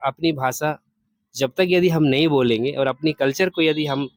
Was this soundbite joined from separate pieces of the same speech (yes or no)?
no